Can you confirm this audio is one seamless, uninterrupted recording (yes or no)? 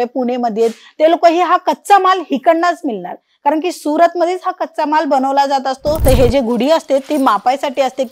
no